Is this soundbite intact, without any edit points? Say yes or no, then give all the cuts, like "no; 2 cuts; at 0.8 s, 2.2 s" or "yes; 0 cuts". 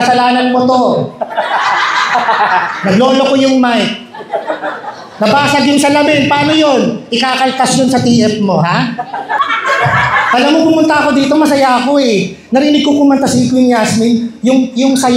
no; 1 cut; at 9.4 s